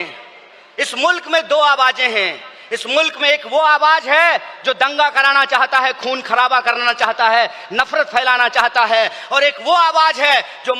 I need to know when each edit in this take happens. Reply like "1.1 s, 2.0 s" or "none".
none